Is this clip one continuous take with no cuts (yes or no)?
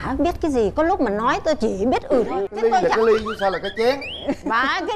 no